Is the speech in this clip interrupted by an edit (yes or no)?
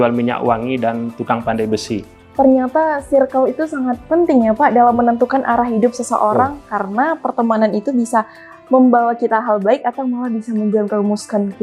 yes